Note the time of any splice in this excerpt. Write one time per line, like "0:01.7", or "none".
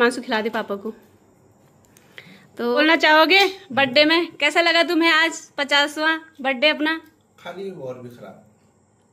0:02.8